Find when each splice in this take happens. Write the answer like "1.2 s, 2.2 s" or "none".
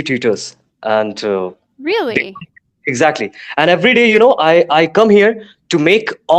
none